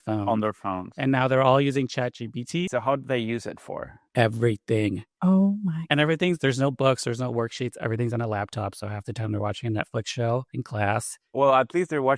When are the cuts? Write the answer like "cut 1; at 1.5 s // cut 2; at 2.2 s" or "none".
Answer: cut 1; at 2.7 s // cut 2; at 5.1 s